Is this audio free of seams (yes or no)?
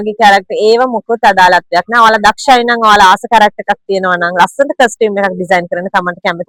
yes